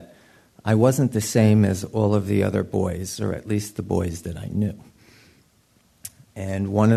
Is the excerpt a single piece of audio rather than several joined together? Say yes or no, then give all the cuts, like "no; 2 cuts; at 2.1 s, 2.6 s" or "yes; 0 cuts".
yes; 0 cuts